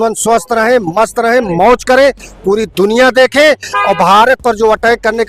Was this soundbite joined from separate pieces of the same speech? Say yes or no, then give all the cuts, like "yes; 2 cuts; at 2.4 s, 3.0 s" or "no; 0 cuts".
no; 0 cuts